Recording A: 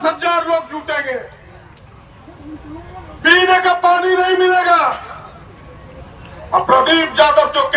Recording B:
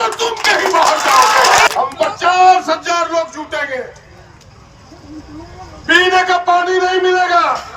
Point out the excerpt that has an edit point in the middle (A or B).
B